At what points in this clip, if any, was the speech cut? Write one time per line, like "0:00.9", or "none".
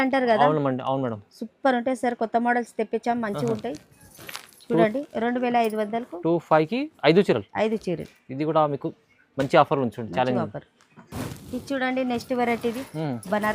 none